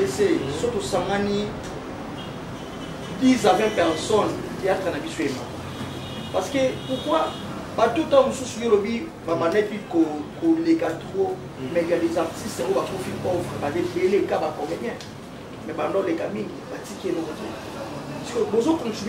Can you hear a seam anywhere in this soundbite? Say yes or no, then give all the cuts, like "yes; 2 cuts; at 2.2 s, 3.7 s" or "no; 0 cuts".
no; 0 cuts